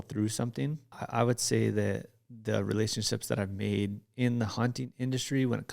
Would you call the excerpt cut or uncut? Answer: cut